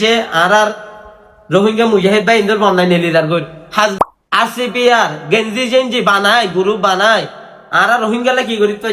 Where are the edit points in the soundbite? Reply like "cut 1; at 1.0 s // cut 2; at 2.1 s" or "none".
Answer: cut 1; at 3.9 s